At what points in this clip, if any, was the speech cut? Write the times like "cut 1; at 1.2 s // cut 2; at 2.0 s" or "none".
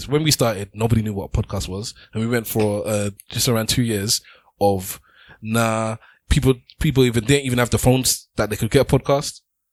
none